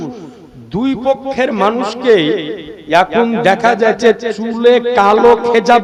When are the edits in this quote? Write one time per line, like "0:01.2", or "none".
none